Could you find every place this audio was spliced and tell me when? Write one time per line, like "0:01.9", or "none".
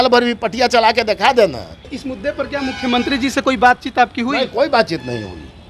0:01.9